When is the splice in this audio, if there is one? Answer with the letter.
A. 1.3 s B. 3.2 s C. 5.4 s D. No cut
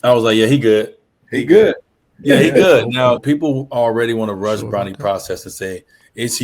B